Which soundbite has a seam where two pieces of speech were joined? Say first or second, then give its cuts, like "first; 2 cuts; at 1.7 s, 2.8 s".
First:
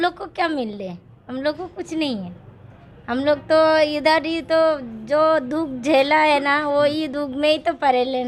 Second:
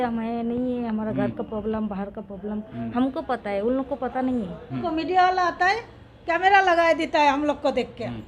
second; 1 cut; at 4.8 s